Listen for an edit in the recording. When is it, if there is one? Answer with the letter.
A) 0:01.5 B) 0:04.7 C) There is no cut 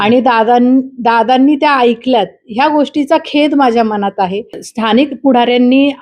B